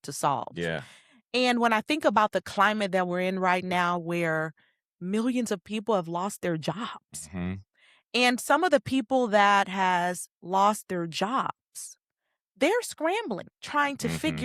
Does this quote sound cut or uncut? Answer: uncut